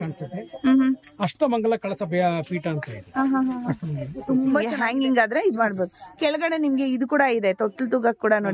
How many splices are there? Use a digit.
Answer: 1